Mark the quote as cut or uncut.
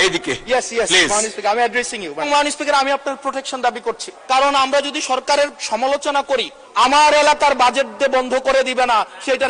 cut